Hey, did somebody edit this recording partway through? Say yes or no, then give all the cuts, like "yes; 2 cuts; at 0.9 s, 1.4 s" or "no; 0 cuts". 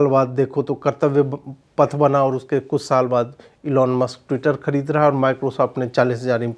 no; 0 cuts